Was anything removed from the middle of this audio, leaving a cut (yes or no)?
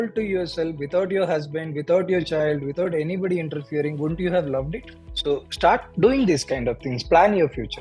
yes